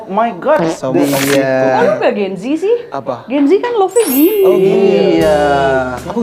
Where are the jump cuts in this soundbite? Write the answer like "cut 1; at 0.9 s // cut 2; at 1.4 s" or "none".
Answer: cut 1; at 1.0 s